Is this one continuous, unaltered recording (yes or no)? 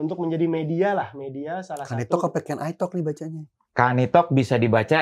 yes